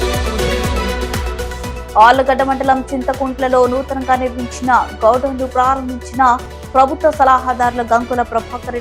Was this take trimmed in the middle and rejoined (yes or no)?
yes